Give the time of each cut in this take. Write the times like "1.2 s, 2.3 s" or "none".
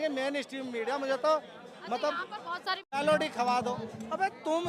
3.0 s